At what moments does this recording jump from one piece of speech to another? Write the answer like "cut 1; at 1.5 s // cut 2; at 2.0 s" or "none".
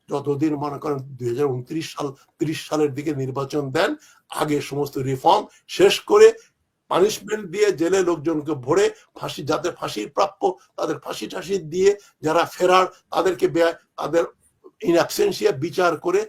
none